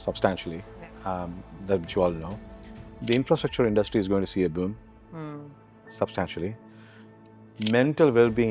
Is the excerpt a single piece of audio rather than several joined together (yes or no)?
yes